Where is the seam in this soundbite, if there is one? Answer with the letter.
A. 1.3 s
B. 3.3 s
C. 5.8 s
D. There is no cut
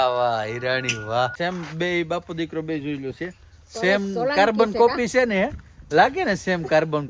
A